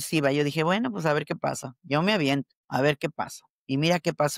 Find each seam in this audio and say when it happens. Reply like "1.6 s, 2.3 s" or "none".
2.6 s